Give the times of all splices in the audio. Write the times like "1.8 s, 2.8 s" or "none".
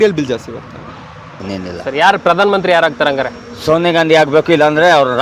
1.3 s